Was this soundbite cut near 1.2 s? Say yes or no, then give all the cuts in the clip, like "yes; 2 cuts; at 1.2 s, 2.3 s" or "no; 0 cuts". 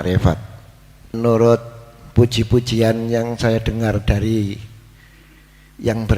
yes; 1 cut; at 1.2 s